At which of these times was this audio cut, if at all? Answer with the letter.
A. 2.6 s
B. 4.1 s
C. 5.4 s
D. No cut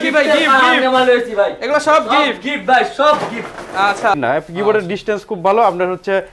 B